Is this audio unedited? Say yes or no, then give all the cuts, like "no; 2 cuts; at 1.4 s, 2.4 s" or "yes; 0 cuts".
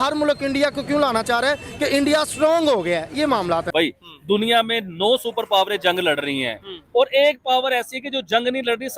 no; 1 cut; at 3.7 s